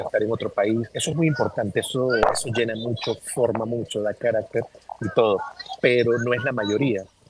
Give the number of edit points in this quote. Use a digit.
2